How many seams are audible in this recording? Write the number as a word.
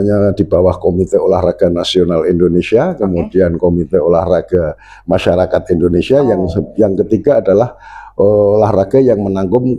zero